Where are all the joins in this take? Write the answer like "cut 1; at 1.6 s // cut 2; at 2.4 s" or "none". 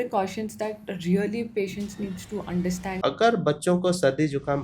cut 1; at 2.9 s